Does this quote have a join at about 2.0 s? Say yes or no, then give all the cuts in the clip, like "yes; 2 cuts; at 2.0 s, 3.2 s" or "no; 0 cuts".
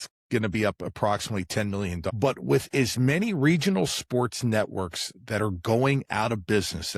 yes; 1 cut; at 2.0 s